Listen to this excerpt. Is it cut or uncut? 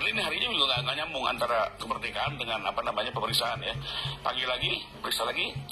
uncut